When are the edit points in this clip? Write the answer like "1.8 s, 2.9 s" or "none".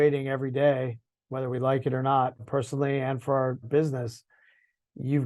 2.4 s, 3.7 s